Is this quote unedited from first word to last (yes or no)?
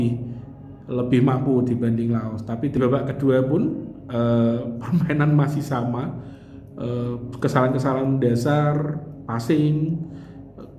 no